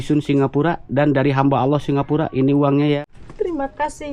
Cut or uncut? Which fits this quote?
cut